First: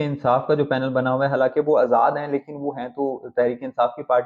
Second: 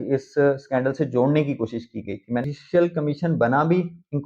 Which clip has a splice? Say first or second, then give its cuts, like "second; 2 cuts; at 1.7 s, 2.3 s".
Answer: second; 1 cut; at 2.5 s